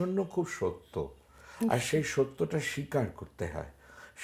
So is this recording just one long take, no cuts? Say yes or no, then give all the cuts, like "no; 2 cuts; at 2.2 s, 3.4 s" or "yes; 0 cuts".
yes; 0 cuts